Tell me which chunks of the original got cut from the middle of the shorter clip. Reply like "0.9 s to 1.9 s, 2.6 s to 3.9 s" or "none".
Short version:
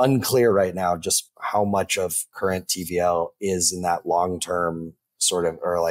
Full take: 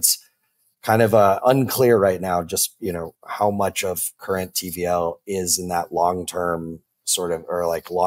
2.7 s to 3.1 s